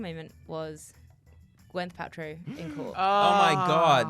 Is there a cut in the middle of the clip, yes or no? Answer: no